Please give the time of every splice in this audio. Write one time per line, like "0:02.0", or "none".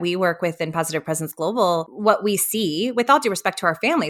0:01.9